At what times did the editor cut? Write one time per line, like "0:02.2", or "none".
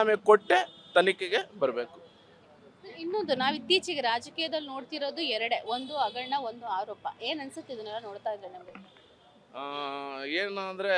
none